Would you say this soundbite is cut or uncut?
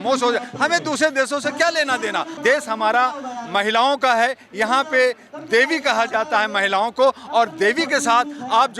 cut